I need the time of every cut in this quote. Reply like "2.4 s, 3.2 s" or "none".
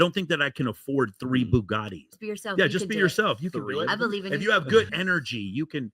2.1 s, 4.9 s